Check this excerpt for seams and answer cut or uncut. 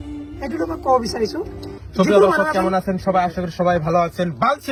uncut